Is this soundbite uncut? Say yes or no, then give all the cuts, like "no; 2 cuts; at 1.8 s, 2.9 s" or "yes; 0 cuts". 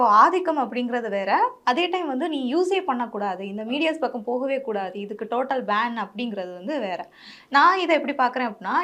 yes; 0 cuts